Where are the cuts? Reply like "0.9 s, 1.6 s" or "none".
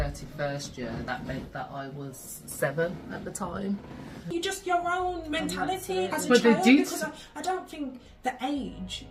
4.3 s